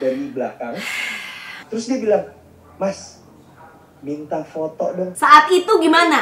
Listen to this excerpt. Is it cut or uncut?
cut